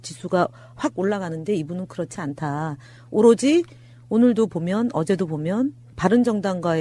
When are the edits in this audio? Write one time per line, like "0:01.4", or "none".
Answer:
0:01.5